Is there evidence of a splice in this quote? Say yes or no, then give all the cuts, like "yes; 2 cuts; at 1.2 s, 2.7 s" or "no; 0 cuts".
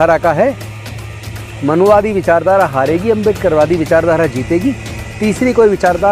no; 0 cuts